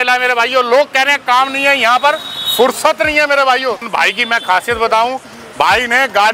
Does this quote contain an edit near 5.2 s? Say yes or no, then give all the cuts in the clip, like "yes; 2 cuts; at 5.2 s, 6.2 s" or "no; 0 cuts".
no; 1 cut; at 3.8 s